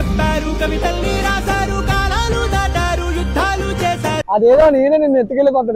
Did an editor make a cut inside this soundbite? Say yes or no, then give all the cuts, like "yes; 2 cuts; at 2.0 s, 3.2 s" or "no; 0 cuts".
yes; 1 cut; at 4.2 s